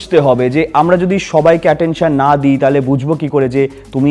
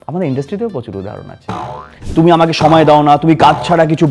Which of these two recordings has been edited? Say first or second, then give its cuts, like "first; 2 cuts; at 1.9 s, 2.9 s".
second; 1 cut; at 2.0 s